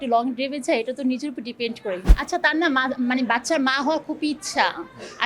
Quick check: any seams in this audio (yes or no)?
yes